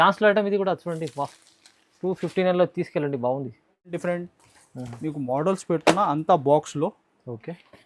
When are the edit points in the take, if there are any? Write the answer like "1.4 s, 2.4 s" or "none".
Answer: 3.9 s